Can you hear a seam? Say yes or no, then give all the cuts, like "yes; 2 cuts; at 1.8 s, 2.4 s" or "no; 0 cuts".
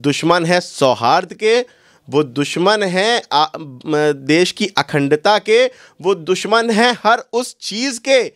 no; 0 cuts